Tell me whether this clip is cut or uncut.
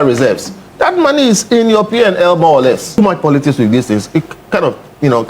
cut